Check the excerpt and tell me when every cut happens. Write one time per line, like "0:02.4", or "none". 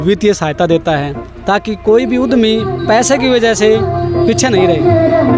none